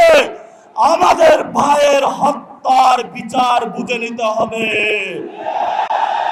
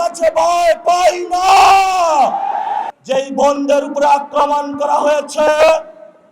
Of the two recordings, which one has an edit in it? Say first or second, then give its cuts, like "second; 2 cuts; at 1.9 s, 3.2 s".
second; 1 cut; at 2.9 s